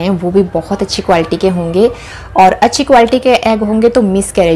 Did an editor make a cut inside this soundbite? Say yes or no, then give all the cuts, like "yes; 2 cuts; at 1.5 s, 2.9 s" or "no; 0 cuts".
no; 0 cuts